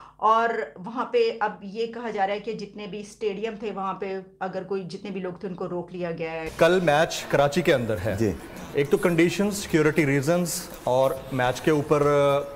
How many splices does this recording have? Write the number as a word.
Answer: one